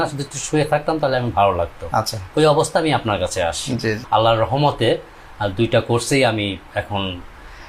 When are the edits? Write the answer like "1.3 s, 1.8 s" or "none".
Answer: 4.0 s